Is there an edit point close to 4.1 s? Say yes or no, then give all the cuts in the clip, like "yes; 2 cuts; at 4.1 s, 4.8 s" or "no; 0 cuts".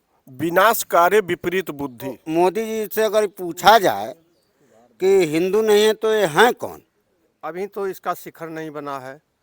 no; 2 cuts; at 2.2 s, 7.4 s